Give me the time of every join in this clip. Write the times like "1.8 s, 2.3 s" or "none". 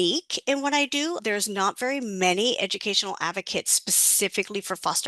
1.2 s